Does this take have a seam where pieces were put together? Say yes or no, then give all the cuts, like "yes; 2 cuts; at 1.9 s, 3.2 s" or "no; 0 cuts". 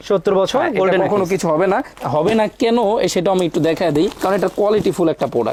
no; 0 cuts